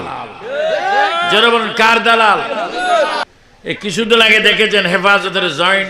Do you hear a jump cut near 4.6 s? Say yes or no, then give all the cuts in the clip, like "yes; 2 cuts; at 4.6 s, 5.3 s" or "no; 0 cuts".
no; 1 cut; at 3.2 s